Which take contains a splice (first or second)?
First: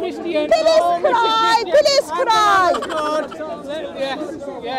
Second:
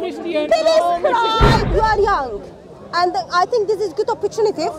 second